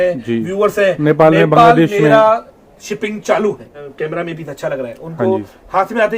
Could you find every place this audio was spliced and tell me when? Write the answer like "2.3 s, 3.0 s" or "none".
3.8 s